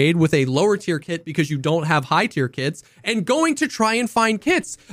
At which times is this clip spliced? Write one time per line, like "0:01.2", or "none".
none